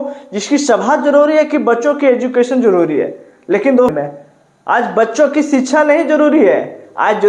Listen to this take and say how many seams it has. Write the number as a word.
one